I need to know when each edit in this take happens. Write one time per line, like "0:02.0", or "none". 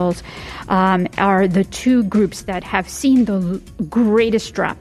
none